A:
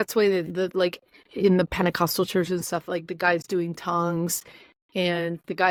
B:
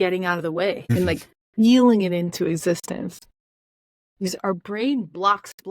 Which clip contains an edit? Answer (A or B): B